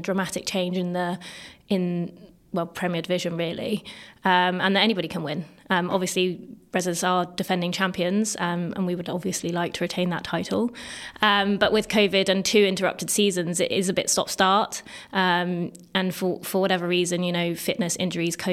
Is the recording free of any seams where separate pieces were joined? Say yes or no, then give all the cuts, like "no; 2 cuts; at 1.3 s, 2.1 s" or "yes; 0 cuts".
yes; 0 cuts